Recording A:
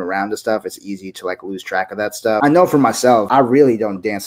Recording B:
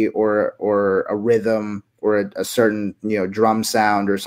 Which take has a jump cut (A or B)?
A